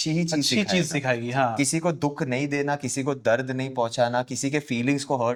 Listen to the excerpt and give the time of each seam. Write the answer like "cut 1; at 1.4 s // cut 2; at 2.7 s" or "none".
none